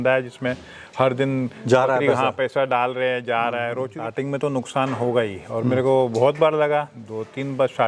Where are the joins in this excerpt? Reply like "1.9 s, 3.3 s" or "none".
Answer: 4.0 s